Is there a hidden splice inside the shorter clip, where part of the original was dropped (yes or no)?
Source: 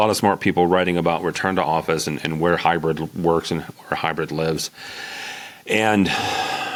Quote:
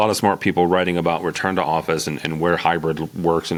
no